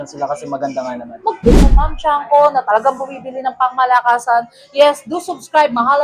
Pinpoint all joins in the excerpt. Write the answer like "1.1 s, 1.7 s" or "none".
1.7 s